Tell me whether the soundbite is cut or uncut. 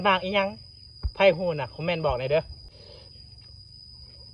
uncut